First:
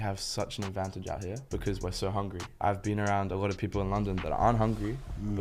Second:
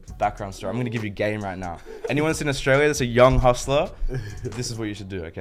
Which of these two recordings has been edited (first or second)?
first